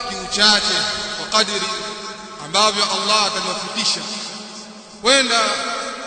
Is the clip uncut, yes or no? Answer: yes